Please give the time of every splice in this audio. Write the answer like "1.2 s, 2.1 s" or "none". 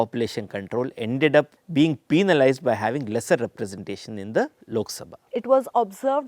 1.6 s, 5.2 s